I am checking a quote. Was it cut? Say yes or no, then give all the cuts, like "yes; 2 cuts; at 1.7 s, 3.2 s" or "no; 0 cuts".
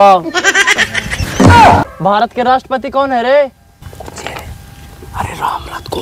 yes; 2 cuts; at 1.9 s, 3.8 s